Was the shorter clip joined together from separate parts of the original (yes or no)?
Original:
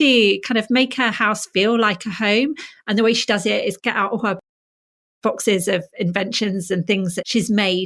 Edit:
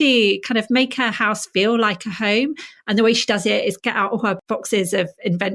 yes